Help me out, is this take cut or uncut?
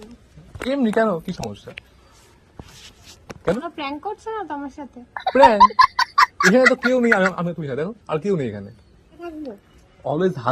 cut